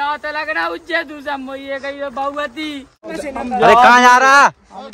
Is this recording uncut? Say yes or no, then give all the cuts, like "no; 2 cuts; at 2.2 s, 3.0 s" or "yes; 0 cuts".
no; 1 cut; at 3.1 s